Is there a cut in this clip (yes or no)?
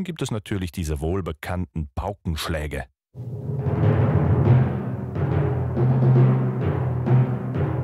no